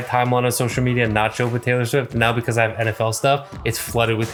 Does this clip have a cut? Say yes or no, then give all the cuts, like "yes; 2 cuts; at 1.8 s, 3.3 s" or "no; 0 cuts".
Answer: no; 0 cuts